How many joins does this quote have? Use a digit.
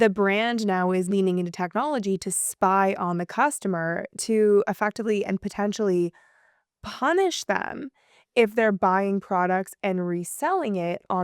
1